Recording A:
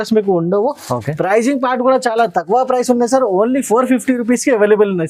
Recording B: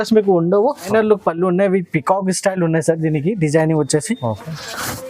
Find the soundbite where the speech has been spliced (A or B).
B